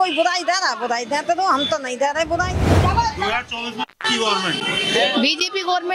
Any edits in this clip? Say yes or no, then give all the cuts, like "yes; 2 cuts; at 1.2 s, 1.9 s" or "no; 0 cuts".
yes; 1 cut; at 2.6 s